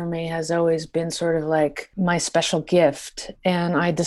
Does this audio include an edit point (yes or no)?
yes